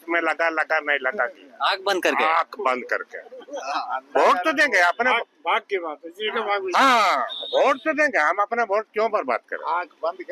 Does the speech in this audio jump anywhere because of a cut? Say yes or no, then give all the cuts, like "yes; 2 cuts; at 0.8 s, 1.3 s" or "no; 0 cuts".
no; 0 cuts